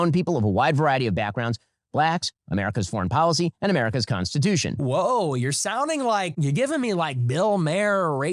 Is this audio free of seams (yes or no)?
no